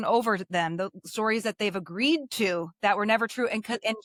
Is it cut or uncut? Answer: uncut